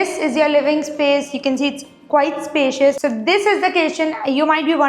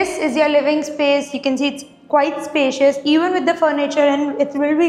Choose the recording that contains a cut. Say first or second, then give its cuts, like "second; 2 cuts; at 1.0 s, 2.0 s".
first; 1 cut; at 3.0 s